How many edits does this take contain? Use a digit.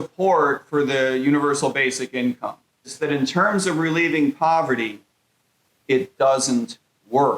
1